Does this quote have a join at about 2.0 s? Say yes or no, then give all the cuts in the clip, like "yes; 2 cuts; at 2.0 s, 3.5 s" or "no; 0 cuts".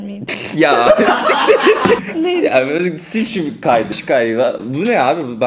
yes; 2 cuts; at 2.0 s, 3.9 s